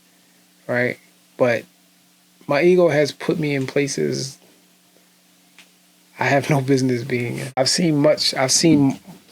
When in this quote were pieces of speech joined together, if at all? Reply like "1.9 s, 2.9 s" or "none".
7.5 s